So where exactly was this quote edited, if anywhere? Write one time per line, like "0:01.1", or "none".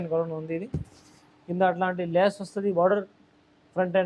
none

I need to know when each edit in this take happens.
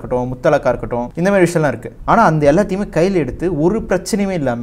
0:01.1
0:01.9

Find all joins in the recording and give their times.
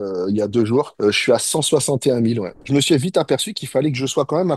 0:00.9
0:02.5

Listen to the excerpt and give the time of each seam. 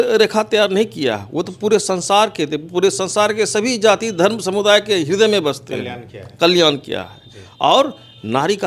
none

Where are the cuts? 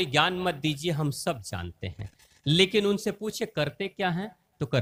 none

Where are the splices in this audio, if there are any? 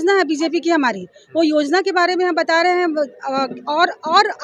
none

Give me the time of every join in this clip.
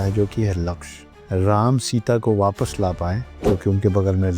0:01.1
0:03.3

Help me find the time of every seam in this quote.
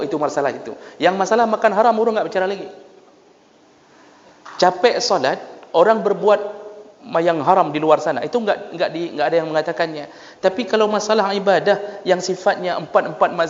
none

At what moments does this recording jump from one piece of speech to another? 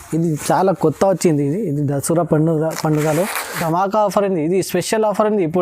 0:03.6

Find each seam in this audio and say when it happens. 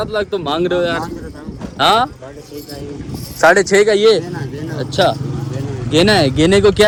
none

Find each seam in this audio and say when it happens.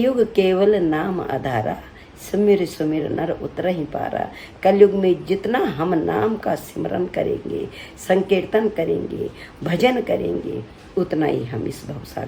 none

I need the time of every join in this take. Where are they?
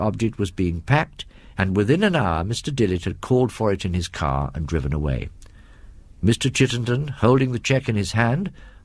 0:03.1

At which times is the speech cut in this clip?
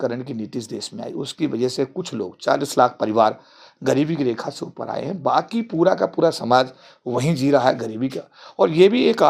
none

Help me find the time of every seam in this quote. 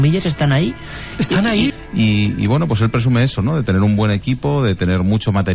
0:01.7

